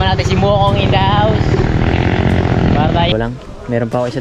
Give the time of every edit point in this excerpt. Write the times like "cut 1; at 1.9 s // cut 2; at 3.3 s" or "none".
cut 1; at 3.1 s